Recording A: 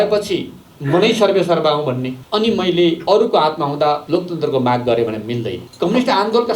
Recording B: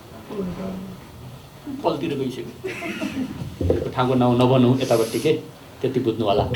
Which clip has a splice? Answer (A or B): A